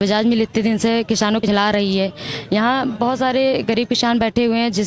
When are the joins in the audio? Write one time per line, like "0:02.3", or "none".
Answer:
0:01.4